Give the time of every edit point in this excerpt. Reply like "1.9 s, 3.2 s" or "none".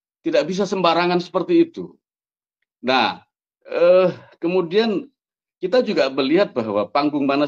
none